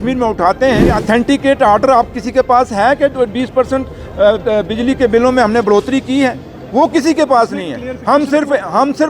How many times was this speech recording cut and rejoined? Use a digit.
1